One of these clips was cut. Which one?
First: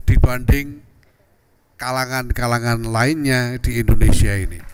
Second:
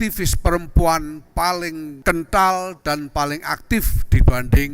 second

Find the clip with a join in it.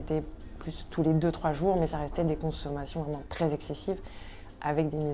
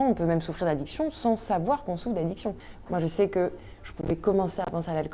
second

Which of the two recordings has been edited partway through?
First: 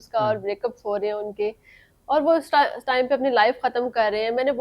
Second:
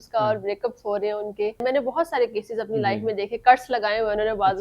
second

